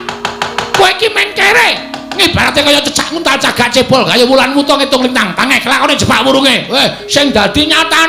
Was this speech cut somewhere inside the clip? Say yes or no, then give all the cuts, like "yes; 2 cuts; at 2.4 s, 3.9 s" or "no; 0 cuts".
no; 0 cuts